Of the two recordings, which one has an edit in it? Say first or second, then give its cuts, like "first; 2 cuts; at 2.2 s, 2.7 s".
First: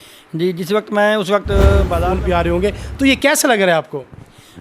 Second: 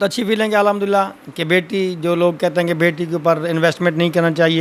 first; 1 cut; at 2.0 s